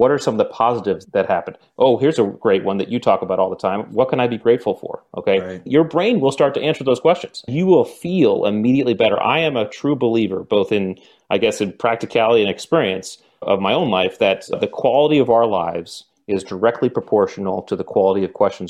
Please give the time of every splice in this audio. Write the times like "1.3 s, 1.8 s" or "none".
5.7 s, 7.5 s